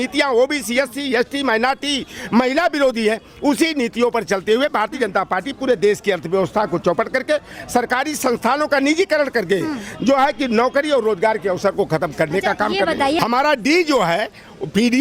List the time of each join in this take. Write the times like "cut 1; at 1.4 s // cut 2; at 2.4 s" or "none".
cut 1; at 13.2 s